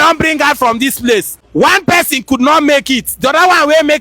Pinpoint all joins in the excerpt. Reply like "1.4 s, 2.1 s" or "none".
1.4 s